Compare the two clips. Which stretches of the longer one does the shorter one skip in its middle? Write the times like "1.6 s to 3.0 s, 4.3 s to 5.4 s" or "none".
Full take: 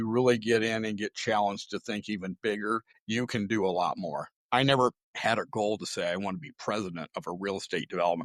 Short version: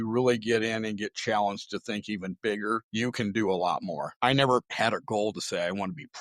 2.9 s to 3.0 s, 4.2 s to 4.4 s, 5.0 s to 5.1 s